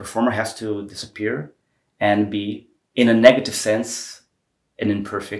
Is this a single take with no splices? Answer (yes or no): yes